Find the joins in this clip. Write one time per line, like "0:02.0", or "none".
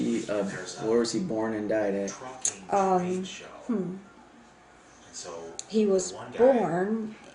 0:03.7